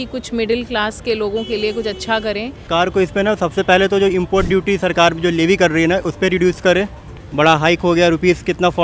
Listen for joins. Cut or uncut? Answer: cut